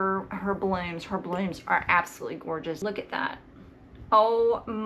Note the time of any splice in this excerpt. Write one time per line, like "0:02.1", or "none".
0:02.8